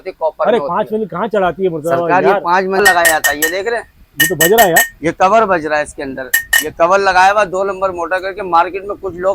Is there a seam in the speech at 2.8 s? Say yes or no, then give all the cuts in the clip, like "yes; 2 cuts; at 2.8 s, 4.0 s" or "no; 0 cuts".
yes; 1 cut; at 2.8 s